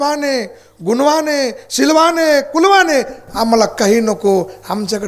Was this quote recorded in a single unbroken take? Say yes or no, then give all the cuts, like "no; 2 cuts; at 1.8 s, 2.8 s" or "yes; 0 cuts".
yes; 0 cuts